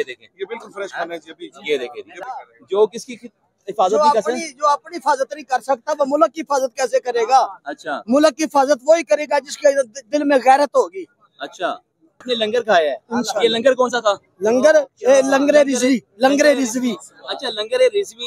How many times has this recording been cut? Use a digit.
2